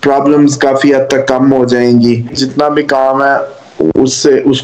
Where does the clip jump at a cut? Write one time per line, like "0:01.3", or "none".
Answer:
0:02.4